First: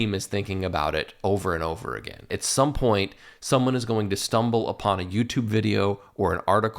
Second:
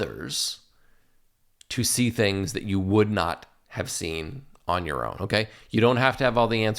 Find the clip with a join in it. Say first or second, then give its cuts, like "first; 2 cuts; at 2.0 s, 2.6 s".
first; 1 cut; at 2.4 s